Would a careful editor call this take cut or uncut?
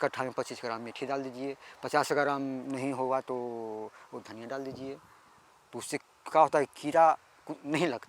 uncut